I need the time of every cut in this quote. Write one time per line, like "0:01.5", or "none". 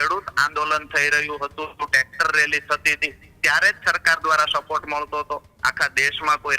0:05.5